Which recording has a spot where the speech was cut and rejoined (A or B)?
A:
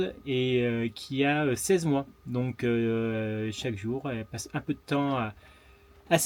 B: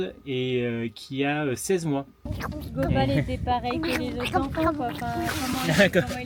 B